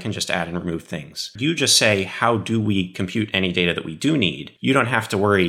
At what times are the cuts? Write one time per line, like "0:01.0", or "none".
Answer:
0:01.3
0:04.5